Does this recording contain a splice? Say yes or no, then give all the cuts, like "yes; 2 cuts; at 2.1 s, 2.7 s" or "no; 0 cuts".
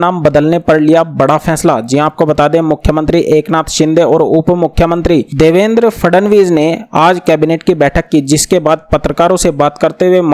no; 0 cuts